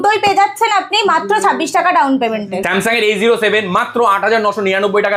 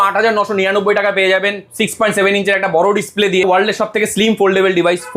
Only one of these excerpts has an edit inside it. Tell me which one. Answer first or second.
second